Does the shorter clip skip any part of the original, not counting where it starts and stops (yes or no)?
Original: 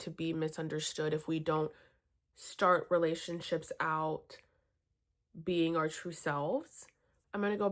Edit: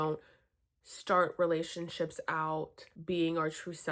yes